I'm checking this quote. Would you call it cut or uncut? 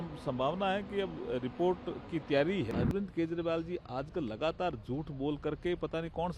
cut